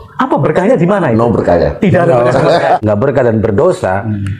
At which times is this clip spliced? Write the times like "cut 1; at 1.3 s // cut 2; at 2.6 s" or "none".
cut 1; at 2.8 s